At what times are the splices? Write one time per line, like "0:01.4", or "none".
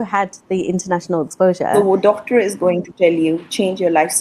0:01.7